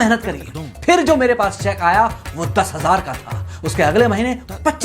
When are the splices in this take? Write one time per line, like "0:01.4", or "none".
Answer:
none

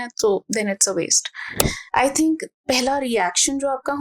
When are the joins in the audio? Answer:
0:01.6

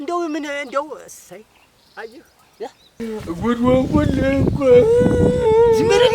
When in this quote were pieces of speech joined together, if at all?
0:03.0

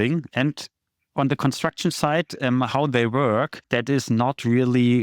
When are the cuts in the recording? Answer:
0:03.6

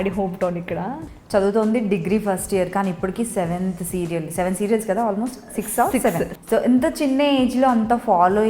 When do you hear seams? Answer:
0:01.1
0:06.4

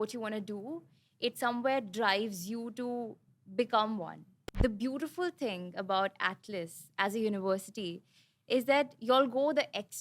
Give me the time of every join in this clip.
0:04.4

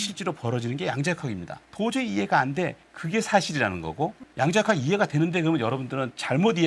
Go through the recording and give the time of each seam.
0:01.7

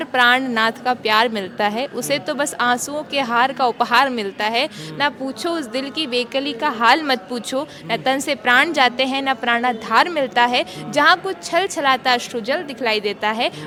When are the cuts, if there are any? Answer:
none

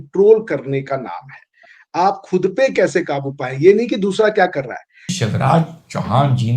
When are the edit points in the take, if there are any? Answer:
0:05.1

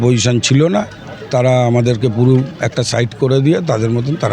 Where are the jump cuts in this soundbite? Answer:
0:02.6

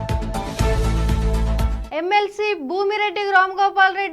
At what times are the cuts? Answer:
0:01.8

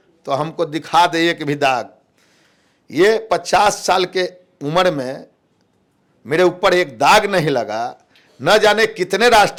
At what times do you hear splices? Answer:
none

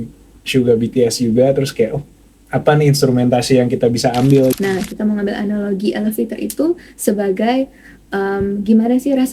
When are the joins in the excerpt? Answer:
0:04.5

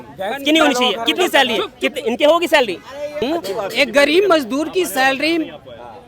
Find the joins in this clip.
0:03.2

